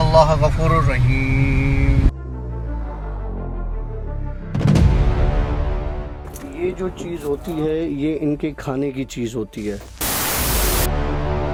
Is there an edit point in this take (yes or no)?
no